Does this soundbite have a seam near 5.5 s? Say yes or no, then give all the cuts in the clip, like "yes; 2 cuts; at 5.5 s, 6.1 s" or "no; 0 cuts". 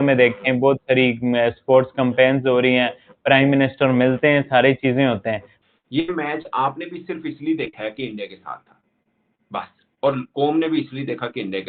yes; 1 cut; at 5.5 s